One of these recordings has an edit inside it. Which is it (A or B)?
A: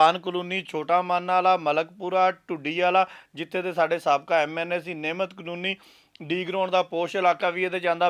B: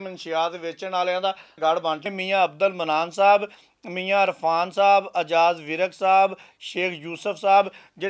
B